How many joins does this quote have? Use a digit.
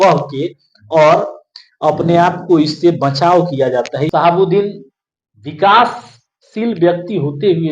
1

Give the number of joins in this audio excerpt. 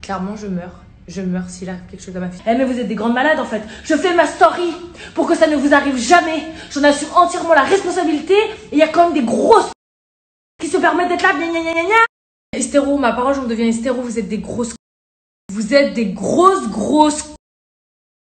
1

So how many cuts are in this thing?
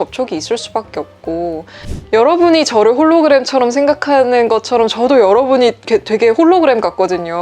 1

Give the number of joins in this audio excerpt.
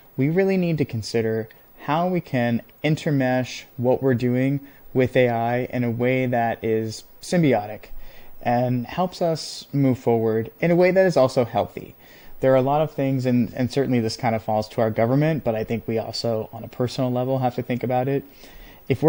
0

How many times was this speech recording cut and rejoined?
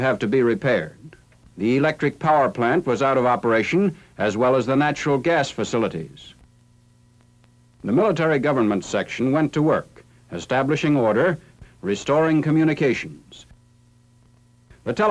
1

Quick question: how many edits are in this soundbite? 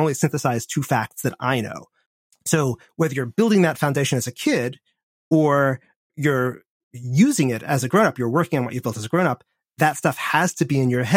1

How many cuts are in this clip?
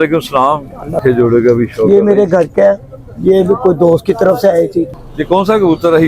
2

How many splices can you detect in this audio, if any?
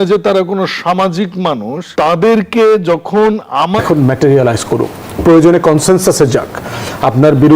2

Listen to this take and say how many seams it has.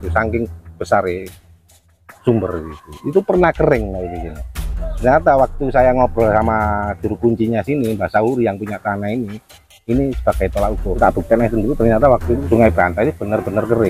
2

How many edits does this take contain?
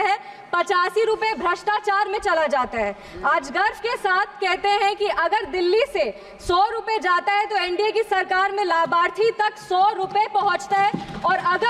0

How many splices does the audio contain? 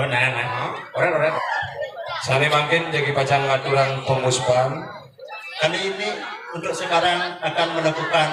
1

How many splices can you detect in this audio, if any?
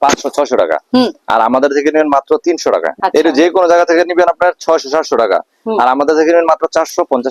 1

